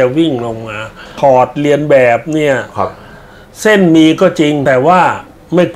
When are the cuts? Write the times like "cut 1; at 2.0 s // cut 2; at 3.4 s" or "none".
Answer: cut 1; at 1.1 s // cut 2; at 4.6 s